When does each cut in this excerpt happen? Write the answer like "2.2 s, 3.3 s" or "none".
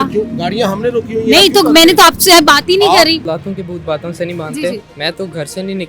3.3 s